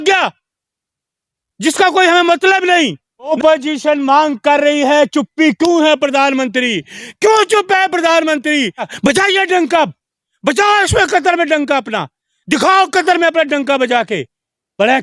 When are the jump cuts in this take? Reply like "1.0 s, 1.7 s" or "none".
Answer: 3.3 s, 8.9 s